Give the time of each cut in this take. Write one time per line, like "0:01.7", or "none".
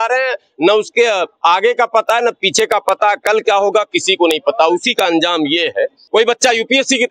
0:06.0

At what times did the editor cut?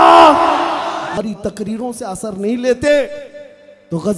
0:01.1

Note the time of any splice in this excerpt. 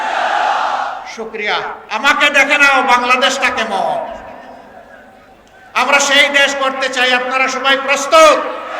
0:01.8

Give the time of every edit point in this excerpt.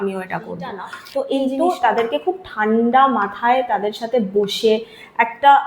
0:01.2

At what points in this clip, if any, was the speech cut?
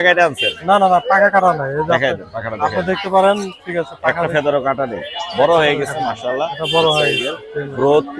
none

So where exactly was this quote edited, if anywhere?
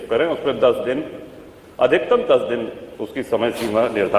none

